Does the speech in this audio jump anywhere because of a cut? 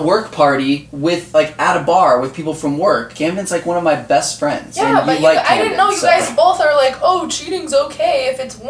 yes; 2 cuts; at 3.1 s, 4.7 s

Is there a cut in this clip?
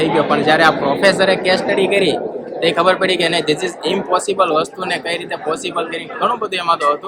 no; 0 cuts

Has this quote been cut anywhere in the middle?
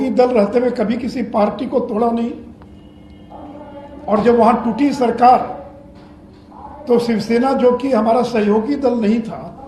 no; 0 cuts

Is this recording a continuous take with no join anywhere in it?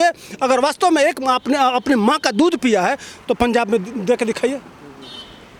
yes; 0 cuts

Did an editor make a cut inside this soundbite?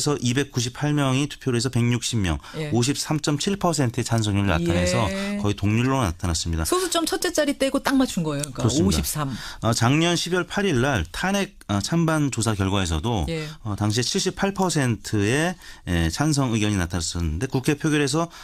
no; 0 cuts

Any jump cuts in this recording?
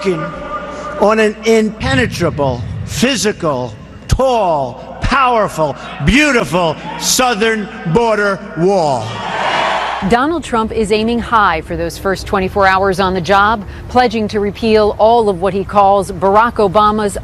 no; 0 cuts

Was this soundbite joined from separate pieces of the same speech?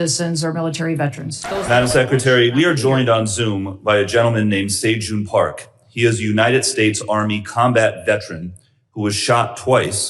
yes; 1 cut; at 1.5 s

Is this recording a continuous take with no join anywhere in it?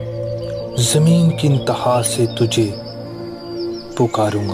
no; 1 cut; at 0.9 s

